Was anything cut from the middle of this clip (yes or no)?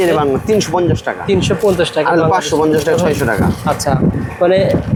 no